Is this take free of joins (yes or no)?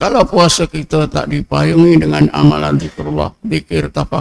yes